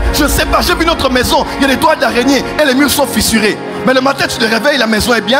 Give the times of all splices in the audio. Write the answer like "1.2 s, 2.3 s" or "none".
none